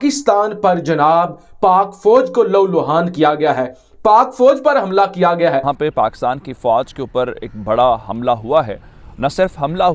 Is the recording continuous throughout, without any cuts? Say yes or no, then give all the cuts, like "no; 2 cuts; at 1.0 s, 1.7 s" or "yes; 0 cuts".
no; 1 cut; at 5.7 s